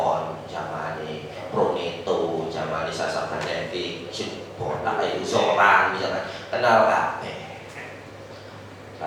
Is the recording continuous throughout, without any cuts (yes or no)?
yes